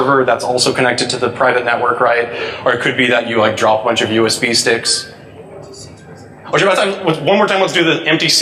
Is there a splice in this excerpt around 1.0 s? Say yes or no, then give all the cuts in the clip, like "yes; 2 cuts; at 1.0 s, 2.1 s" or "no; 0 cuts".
no; 1 cut; at 4.8 s